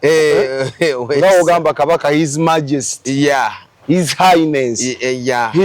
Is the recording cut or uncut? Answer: uncut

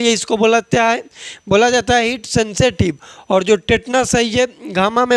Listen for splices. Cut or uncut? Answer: uncut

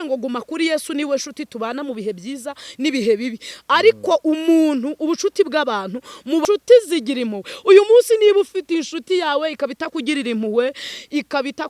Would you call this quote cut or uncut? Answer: cut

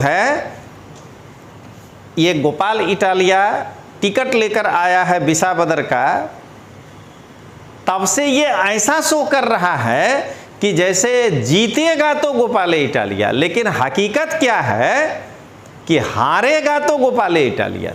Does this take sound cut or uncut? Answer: uncut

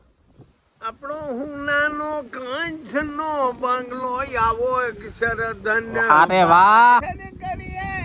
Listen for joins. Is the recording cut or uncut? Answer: cut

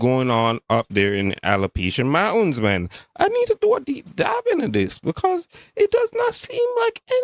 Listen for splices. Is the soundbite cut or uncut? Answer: uncut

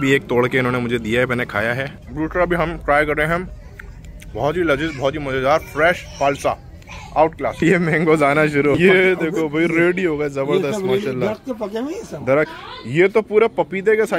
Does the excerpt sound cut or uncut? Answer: cut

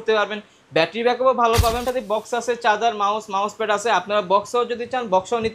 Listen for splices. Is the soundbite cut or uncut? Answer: cut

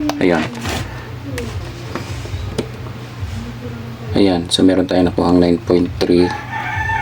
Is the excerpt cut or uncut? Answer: cut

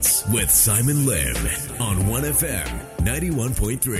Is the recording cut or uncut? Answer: uncut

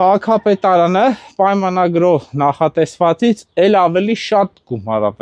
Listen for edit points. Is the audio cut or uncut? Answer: uncut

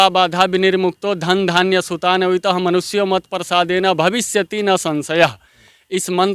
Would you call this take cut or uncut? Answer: uncut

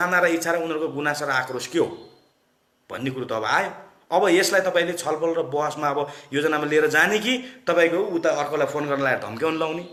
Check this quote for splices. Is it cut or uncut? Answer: uncut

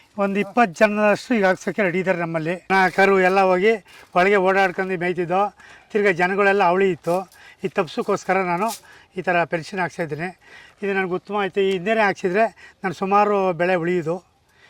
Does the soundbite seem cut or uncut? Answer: cut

